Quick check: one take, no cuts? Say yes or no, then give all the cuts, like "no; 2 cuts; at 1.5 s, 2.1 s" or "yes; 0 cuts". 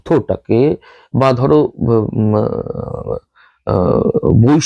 yes; 0 cuts